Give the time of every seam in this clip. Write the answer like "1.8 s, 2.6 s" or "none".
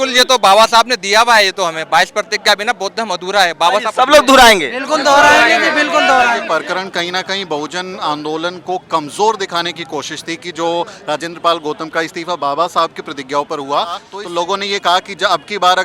6.4 s, 14.1 s

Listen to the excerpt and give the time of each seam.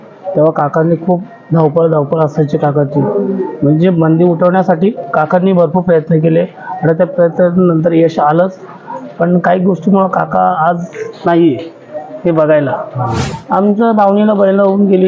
13.3 s

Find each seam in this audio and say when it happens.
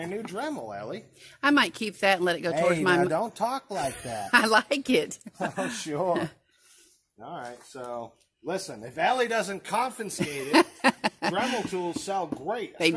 none

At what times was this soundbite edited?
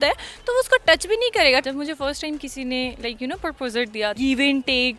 1.6 s, 4.2 s

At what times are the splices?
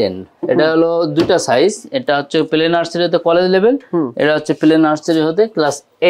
none

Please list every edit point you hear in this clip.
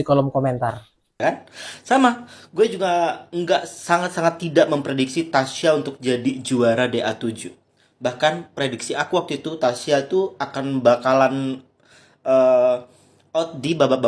1.2 s

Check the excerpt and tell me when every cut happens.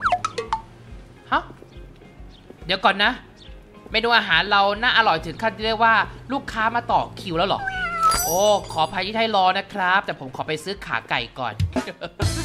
none

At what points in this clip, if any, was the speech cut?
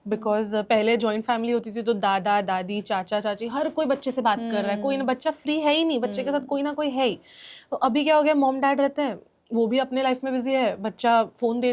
none

